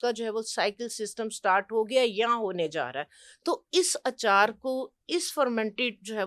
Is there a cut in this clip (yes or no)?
no